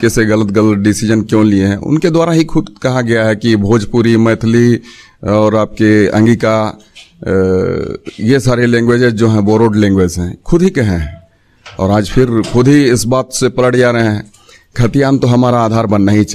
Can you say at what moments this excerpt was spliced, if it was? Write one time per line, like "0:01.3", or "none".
none